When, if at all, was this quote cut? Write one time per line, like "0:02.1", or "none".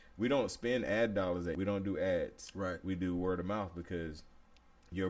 0:01.5